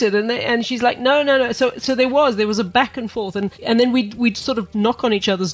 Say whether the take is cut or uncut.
uncut